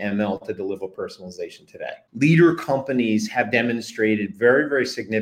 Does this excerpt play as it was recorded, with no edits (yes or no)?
no